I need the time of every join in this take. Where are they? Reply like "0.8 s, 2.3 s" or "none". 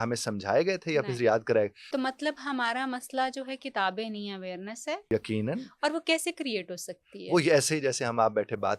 1.8 s, 5.1 s